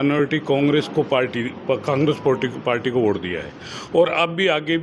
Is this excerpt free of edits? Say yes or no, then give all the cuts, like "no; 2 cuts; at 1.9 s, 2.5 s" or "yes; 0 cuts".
yes; 0 cuts